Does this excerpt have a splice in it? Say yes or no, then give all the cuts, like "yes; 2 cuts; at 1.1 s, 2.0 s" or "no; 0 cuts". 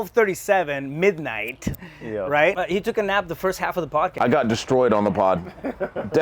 yes; 2 cuts; at 2.6 s, 4.1 s